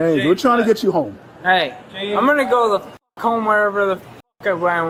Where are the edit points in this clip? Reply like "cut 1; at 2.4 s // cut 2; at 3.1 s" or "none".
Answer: none